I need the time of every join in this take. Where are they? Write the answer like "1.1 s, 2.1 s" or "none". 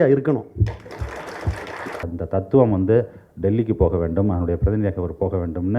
2.0 s